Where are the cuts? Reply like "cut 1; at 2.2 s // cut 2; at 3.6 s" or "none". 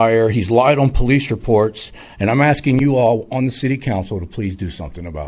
none